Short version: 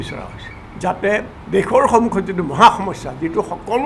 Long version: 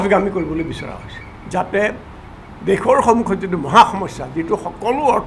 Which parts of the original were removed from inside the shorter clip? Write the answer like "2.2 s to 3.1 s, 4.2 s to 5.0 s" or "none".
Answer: 2.1 s to 2.5 s